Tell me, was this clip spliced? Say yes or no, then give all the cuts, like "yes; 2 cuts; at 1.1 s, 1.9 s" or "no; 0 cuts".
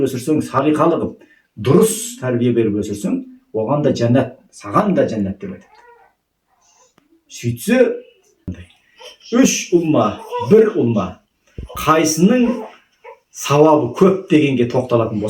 yes; 1 cut; at 8.5 s